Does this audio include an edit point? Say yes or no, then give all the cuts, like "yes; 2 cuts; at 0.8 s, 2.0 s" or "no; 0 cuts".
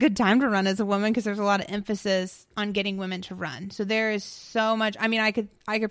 no; 0 cuts